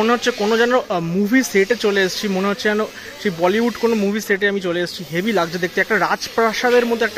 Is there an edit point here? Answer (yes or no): no